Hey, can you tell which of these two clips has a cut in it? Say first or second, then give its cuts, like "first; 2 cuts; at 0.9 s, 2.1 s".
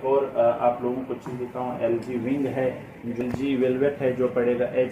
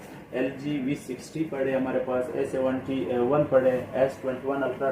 first; 1 cut; at 3.2 s